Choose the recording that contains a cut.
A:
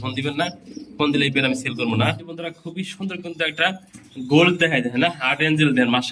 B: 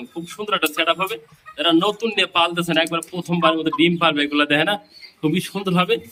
A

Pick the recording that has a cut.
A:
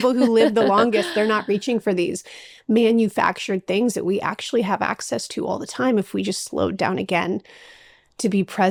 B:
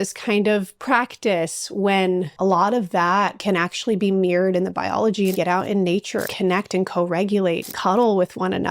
B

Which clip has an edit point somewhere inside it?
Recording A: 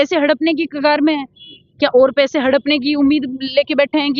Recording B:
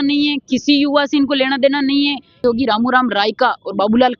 B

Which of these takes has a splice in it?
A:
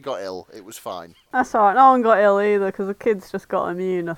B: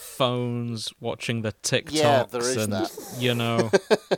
A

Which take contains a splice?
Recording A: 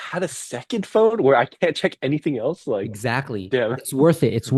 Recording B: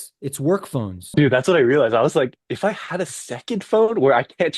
B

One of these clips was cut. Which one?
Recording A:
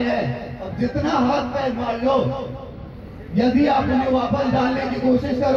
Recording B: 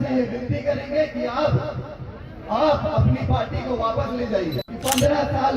B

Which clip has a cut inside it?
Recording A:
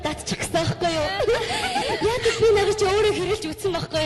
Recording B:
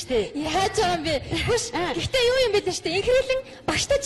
A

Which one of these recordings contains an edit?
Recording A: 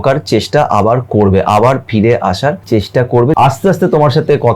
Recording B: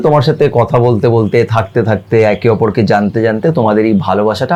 A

